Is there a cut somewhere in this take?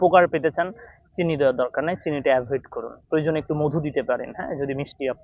no; 0 cuts

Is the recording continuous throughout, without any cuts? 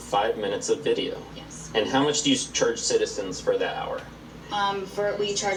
yes; 0 cuts

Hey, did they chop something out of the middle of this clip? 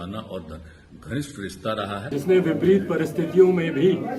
yes; 1 cut; at 2.0 s

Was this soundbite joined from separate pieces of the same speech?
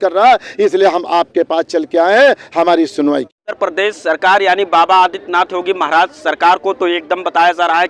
yes; 1 cut; at 3.6 s

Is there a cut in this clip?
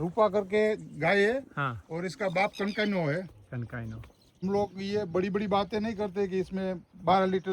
yes; 1 cut; at 4.4 s

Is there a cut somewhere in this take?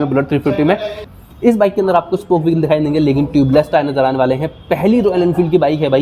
yes; 1 cut; at 1.0 s

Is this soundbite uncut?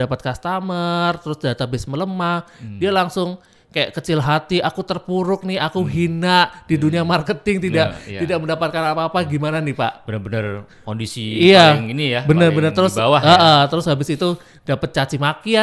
yes; 0 cuts

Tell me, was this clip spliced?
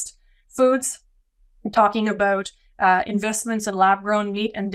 no; 0 cuts

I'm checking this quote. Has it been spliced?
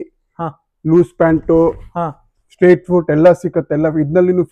no; 0 cuts

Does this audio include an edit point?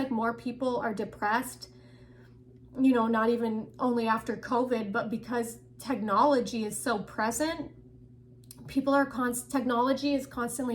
no; 0 cuts

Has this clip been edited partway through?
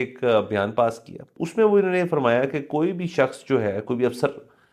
yes; 1 cut; at 1.3 s

